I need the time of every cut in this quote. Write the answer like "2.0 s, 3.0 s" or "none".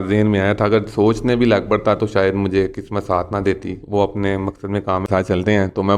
5.0 s